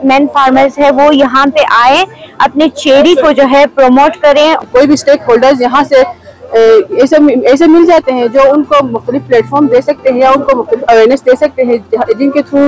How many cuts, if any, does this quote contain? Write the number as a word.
one